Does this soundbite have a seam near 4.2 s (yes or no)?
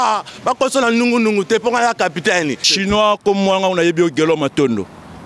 no